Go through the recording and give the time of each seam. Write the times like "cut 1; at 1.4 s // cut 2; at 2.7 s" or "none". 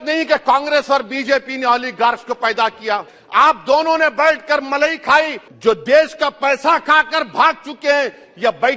cut 1; at 3.2 s // cut 2; at 5.4 s